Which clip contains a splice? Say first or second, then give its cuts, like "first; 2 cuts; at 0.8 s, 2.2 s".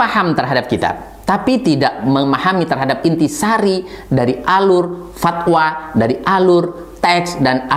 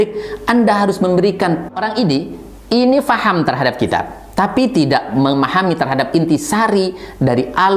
second; 1 cut; at 1.7 s